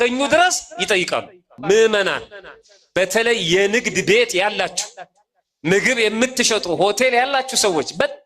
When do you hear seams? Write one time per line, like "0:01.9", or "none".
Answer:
0:01.5